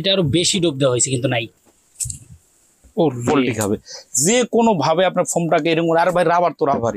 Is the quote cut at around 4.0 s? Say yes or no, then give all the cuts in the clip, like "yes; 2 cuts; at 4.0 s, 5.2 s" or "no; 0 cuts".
no; 1 cut; at 1.5 s